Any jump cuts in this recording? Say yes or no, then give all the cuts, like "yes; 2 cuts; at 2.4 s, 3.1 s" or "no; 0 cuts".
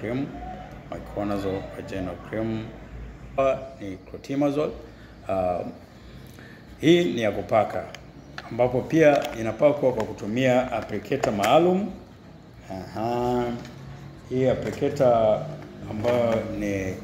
yes; 1 cut; at 3.4 s